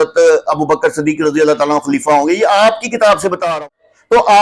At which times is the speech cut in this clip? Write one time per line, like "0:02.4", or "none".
0:03.4